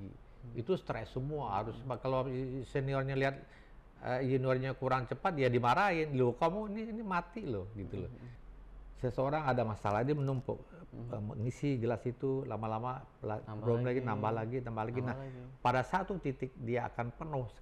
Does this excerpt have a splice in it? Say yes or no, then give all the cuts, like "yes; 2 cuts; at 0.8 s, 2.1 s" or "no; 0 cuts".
yes; 1 cut; at 8.4 s